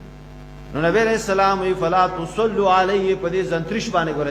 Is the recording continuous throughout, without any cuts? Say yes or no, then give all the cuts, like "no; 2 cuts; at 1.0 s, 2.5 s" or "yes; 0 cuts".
yes; 0 cuts